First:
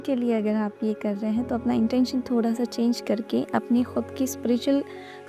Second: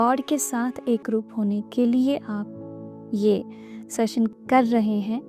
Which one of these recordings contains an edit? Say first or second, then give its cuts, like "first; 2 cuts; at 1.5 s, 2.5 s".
second; 1 cut; at 4.3 s